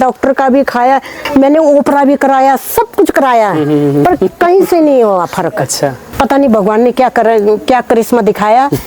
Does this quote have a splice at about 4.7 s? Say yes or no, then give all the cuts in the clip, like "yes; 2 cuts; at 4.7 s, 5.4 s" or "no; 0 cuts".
no; 2 cuts; at 1.3 s, 6.1 s